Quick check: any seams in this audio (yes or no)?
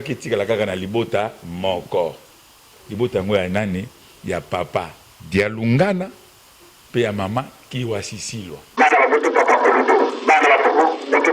yes